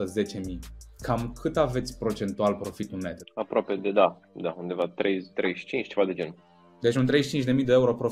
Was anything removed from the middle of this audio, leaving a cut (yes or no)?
yes